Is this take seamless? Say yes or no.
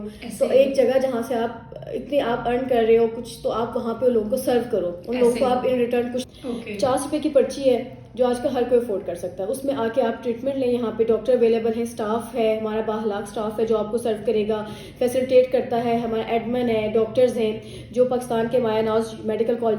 no